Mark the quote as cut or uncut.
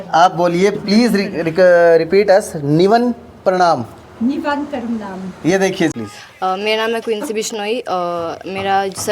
cut